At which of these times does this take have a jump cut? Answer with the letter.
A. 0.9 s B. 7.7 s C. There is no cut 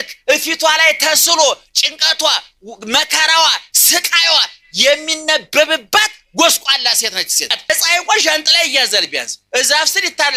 B